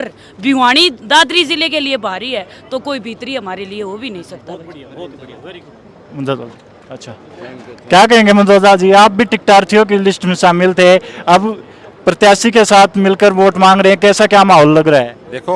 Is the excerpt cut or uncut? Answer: uncut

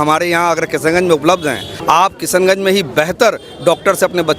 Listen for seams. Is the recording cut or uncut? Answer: cut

